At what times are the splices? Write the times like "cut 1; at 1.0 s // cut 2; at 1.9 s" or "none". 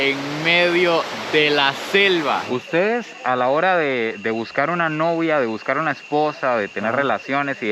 cut 1; at 2.4 s